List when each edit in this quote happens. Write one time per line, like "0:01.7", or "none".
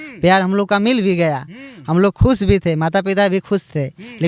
none